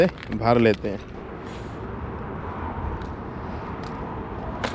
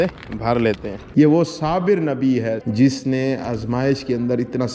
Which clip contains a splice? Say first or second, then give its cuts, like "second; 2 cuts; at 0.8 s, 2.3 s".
second; 2 cuts; at 0.9 s, 2.6 s